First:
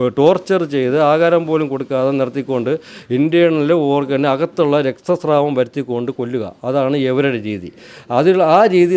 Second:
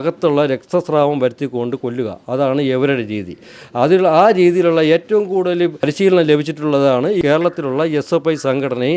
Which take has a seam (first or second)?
second